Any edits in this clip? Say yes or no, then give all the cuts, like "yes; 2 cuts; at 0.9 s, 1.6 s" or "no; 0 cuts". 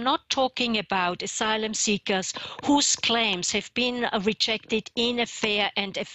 no; 0 cuts